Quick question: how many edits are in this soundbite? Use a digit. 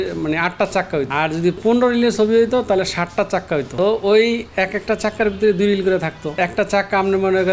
3